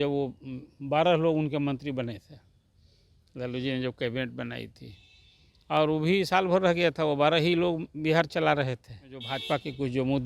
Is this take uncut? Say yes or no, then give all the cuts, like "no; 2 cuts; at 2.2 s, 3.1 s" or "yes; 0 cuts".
no; 1 cut; at 9.3 s